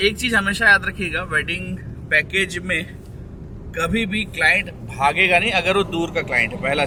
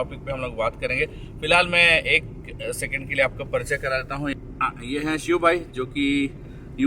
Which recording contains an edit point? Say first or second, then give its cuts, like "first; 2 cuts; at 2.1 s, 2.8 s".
second; 1 cut; at 4.3 s